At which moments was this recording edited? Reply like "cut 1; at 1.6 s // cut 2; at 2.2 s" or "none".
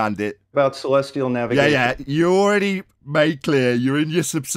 none